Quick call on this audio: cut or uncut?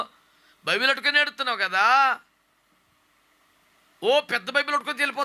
uncut